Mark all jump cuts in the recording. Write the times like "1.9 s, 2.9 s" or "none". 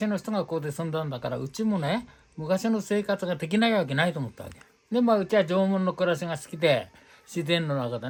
none